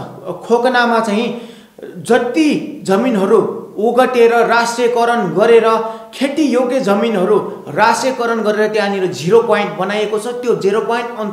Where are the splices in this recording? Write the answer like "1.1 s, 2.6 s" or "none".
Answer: none